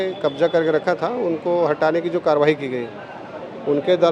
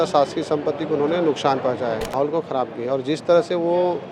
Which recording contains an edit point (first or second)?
second